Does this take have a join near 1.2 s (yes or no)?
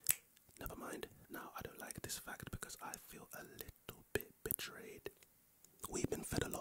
yes